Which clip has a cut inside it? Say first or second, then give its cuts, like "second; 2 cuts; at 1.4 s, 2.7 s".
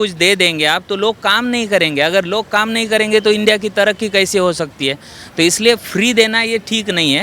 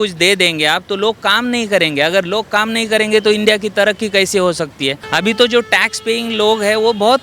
second; 1 cut; at 5.0 s